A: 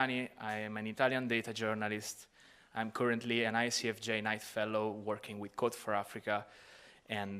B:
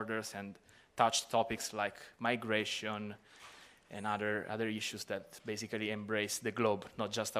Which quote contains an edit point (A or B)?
A